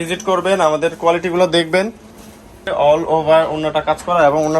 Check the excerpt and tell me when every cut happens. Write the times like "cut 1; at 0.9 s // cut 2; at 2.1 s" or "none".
cut 1; at 2.6 s